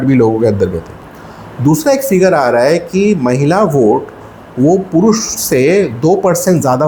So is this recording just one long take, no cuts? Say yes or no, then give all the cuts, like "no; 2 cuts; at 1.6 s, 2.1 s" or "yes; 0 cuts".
yes; 0 cuts